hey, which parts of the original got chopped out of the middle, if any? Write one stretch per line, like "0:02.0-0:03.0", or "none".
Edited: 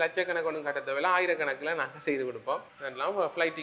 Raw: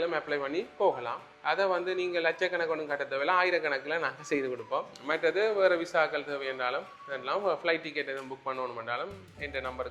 0:04.9-0:07.0